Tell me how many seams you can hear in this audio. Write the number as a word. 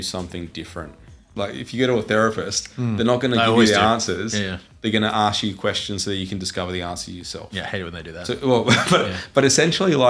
one